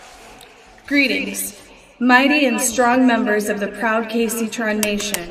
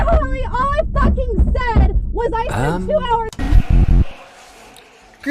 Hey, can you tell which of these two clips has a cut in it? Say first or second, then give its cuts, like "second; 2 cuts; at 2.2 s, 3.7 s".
second; 1 cut; at 3.4 s